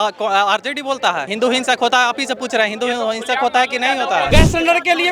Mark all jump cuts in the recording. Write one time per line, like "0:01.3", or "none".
0:01.3
0:04.3